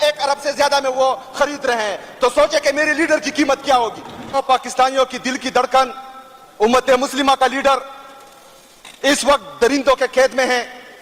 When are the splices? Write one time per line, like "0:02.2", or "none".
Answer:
0:04.4